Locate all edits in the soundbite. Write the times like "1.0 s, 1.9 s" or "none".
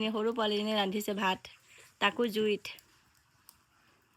none

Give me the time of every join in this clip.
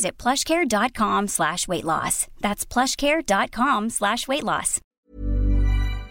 4.8 s

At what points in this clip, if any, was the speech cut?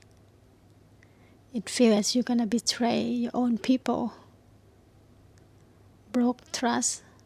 none

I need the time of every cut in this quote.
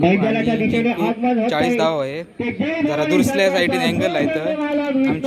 none

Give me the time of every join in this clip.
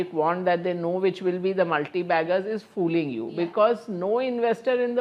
none

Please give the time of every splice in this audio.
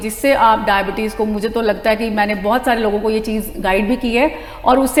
none

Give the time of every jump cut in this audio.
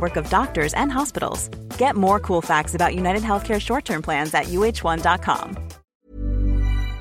6.0 s

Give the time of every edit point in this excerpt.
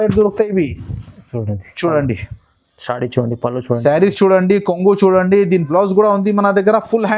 5.7 s

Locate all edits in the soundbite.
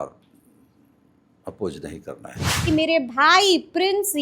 2.7 s

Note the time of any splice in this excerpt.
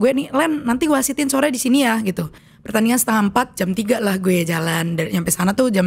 2.3 s

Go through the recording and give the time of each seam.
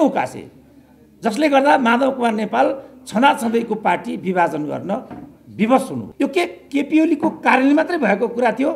6.1 s

